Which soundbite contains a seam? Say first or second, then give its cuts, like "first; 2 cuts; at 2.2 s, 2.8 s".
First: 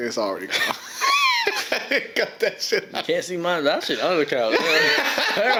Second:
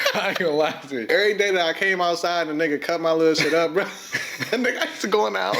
second; 1 cut; at 1.1 s